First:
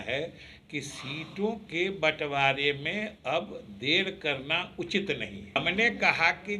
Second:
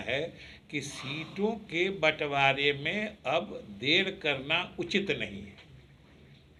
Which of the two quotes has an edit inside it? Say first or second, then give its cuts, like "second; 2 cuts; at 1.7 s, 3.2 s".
first; 1 cut; at 5.6 s